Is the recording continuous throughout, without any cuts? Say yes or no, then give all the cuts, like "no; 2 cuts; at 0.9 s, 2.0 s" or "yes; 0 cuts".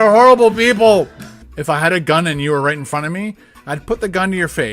no; 1 cut; at 1.5 s